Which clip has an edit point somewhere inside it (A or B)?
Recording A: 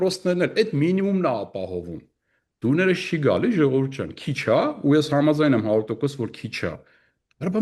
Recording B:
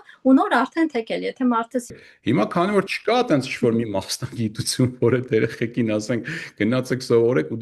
B